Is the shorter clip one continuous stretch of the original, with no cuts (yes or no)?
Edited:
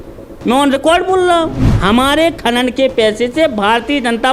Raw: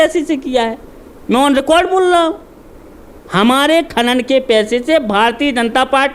no